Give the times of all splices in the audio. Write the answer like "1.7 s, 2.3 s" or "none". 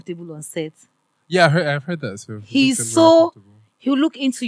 none